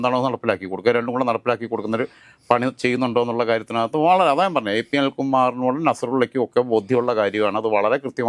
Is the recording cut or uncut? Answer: uncut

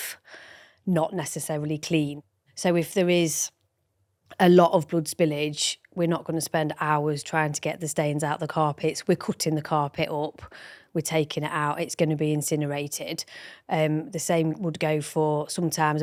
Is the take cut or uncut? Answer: uncut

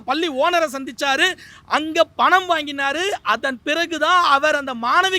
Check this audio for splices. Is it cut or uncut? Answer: uncut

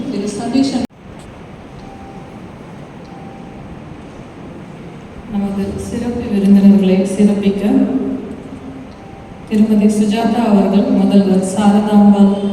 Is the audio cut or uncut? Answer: cut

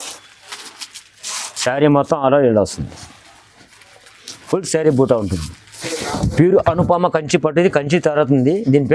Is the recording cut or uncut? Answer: cut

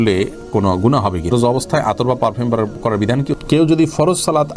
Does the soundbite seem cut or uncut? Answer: cut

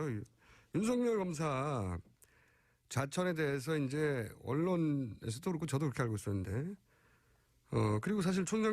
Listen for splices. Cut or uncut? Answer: cut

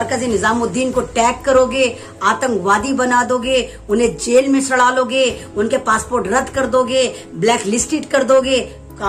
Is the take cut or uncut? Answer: uncut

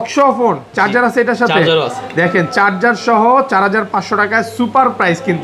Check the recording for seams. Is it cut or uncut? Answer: uncut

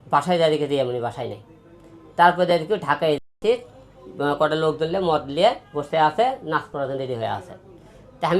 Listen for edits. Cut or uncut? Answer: uncut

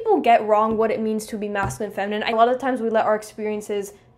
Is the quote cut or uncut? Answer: cut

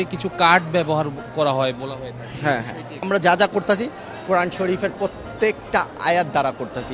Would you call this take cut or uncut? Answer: cut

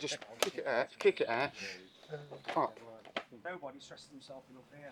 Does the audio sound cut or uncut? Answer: cut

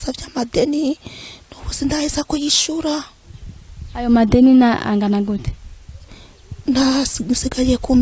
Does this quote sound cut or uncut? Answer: uncut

